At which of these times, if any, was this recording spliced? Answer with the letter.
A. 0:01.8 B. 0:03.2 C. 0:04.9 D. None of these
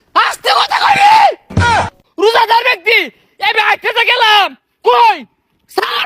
A